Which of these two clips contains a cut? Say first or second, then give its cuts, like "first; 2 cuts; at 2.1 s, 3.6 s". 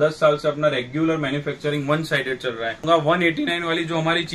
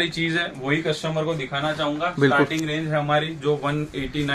first; 1 cut; at 2.8 s